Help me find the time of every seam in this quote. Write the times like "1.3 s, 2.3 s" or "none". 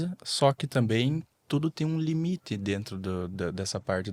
none